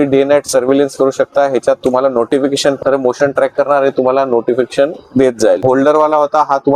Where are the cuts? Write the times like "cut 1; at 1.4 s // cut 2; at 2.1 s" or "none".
cut 1; at 2.8 s // cut 2; at 5.6 s